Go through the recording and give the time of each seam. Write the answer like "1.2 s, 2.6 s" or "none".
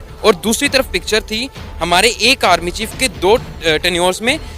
3.1 s